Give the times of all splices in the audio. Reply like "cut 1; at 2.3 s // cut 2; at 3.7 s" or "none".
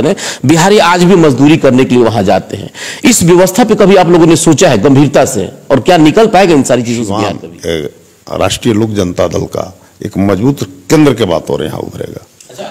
cut 1; at 7.1 s